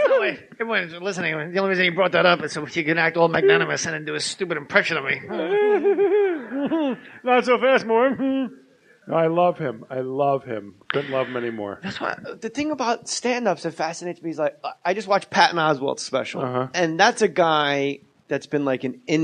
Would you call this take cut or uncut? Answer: cut